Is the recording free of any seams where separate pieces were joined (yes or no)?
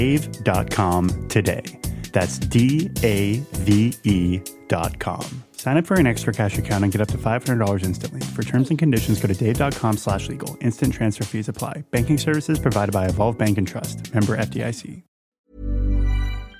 no